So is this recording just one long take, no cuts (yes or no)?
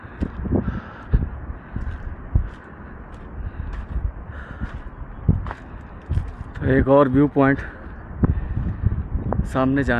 yes